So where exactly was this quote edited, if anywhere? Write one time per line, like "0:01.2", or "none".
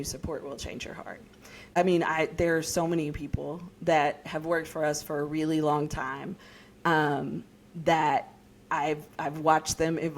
0:01.7

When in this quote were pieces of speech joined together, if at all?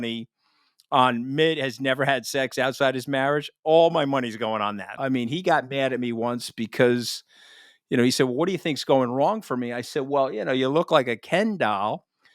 0:04.9

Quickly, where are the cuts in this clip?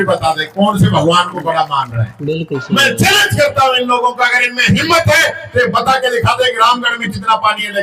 0:02.6

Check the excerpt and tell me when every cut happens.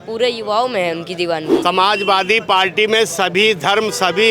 0:01.5

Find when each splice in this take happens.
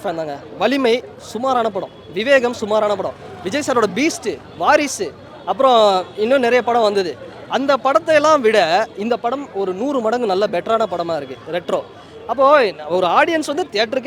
none

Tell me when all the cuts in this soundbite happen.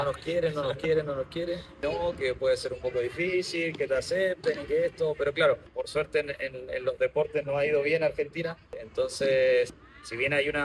0:01.8
0:05.7
0:08.8
0:09.8

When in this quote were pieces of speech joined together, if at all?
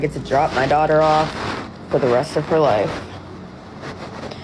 none

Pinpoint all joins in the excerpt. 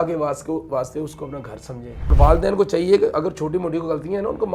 0:02.1

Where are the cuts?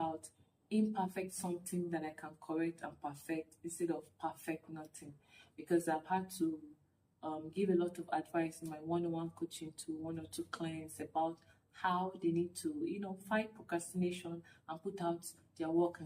none

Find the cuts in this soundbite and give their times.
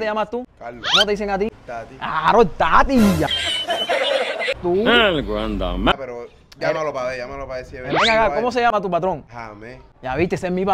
0:04.6
0:05.9

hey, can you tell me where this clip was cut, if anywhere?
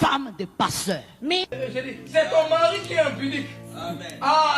0:01.5

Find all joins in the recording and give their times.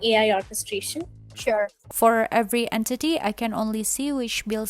0:01.6

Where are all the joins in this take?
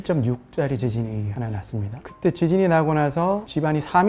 0:02.0

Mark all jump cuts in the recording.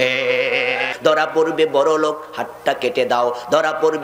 0:00.9

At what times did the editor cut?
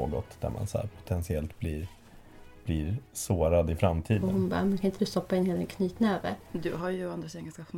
0:04.2
0:06.5

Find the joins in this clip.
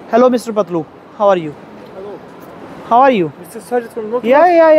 none

